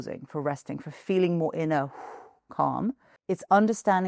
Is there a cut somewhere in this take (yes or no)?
yes